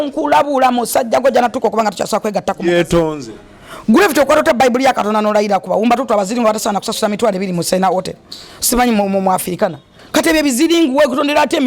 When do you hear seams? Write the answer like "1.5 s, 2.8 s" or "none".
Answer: none